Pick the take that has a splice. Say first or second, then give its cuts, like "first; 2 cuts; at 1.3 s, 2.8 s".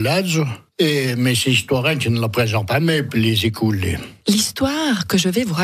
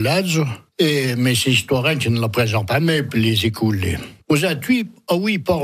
second; 1 cut; at 4.2 s